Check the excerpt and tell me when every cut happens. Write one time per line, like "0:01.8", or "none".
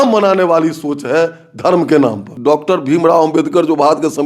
0:02.3